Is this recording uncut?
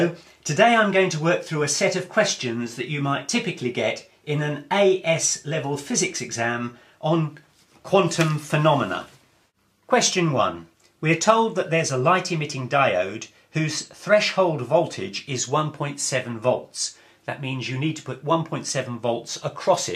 yes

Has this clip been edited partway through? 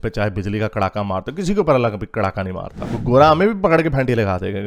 yes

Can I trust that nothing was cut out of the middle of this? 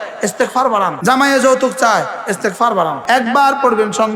no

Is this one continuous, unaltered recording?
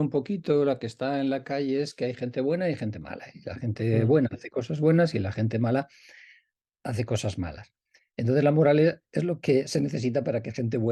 yes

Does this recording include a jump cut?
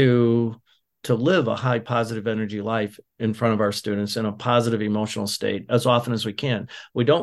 yes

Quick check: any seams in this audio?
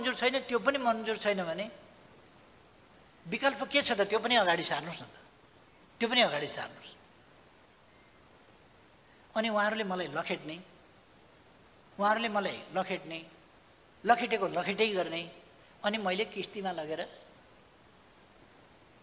no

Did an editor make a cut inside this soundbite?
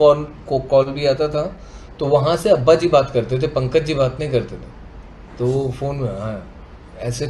no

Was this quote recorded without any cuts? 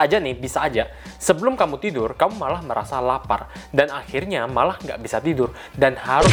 yes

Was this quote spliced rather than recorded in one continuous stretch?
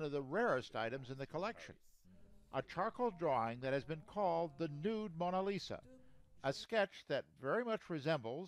yes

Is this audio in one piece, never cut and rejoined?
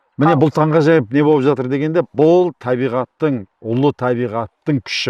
yes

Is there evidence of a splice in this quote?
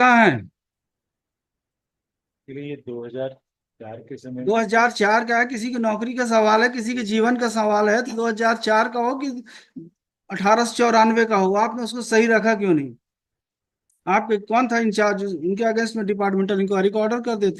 no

